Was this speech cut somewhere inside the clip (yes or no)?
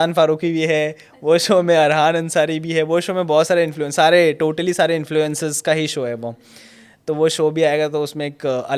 no